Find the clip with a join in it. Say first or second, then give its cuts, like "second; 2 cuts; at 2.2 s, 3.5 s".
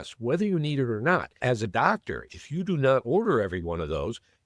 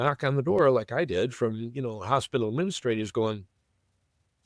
first; 1 cut; at 1.4 s